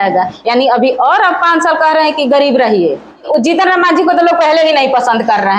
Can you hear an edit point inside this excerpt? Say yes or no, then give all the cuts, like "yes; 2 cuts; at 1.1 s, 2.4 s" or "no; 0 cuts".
yes; 1 cut; at 3.3 s